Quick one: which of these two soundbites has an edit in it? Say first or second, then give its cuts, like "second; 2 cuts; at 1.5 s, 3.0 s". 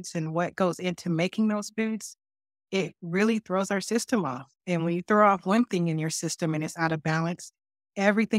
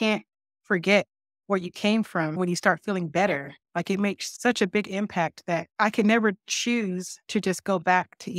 second; 4 cuts; at 2.4 s, 4.3 s, 5.7 s, 7.1 s